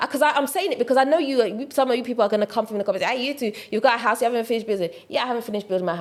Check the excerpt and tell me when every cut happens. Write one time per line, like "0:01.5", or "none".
none